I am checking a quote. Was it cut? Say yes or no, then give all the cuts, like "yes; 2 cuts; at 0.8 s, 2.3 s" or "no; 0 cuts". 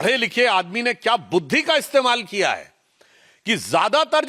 no; 0 cuts